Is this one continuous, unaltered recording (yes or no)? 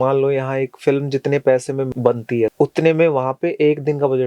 no